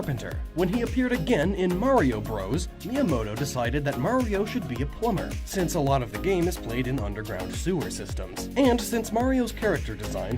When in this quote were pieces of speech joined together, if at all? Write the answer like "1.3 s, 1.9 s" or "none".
6.2 s

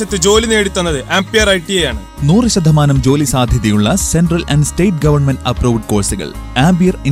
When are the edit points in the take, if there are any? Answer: none

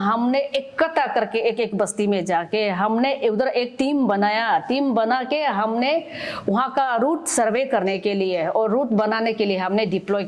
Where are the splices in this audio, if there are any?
none

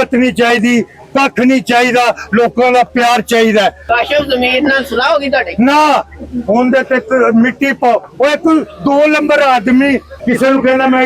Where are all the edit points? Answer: 3.8 s, 10.1 s

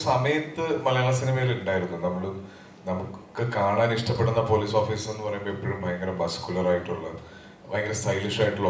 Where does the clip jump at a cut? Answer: none

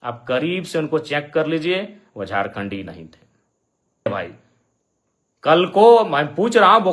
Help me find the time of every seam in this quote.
4.1 s

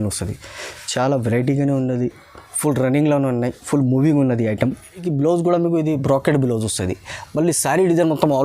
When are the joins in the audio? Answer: 5.1 s

